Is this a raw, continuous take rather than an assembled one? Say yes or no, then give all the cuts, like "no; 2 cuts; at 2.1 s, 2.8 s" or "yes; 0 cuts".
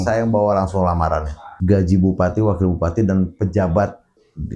no; 1 cut; at 1.5 s